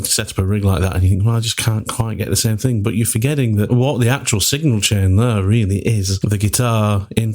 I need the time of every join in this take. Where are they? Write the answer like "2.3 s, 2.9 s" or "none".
3.7 s, 6.1 s